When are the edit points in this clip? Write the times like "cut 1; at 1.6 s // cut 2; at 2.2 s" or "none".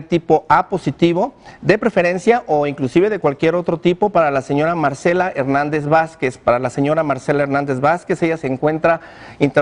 cut 1; at 2.2 s